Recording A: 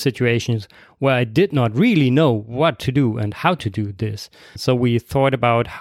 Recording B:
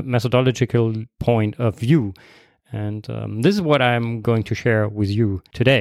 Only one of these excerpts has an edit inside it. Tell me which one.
A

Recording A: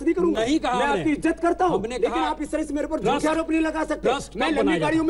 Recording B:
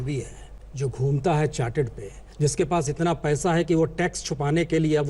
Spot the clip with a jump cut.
B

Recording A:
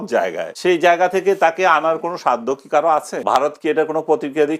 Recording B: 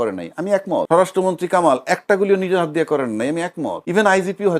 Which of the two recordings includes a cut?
A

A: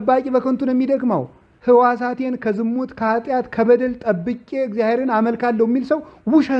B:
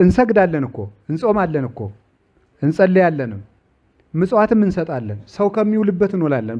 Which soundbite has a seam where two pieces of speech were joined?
A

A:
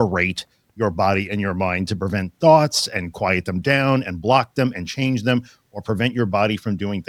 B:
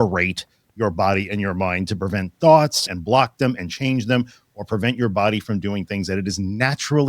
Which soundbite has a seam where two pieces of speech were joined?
B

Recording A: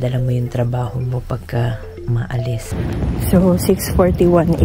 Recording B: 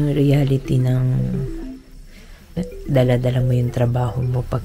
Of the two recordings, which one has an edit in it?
A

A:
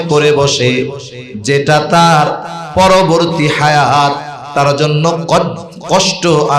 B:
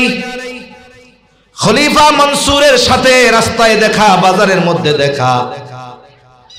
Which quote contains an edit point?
A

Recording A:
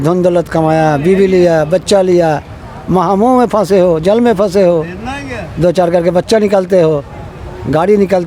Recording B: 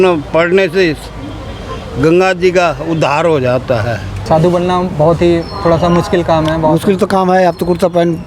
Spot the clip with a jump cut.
B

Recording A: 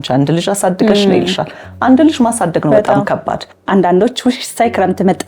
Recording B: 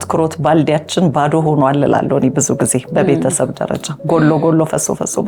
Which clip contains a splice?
A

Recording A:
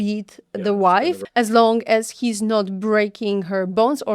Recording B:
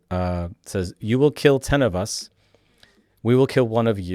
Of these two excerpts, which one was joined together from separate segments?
A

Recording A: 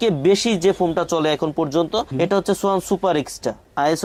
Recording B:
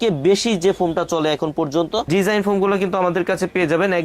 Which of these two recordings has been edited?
B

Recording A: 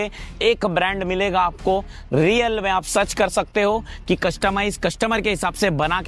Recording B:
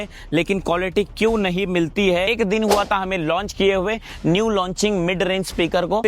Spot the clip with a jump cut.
B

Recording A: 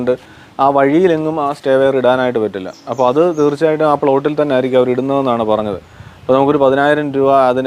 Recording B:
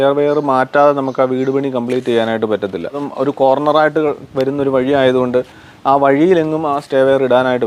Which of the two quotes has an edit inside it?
B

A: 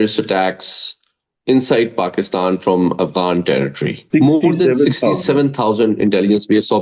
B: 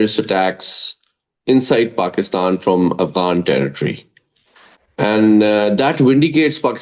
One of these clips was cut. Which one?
A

